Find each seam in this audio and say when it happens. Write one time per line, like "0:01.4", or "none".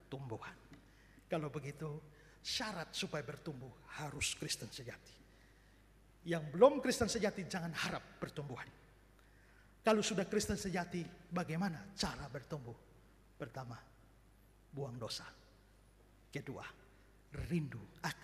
none